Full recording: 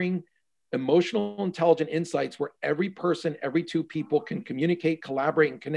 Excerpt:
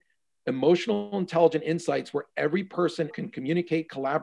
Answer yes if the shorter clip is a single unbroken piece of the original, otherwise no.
no